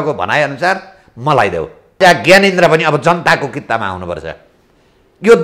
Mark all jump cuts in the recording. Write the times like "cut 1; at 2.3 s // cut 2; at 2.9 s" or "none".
cut 1; at 2.0 s